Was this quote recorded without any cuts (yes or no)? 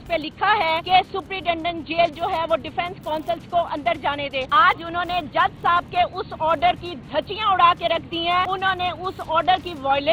no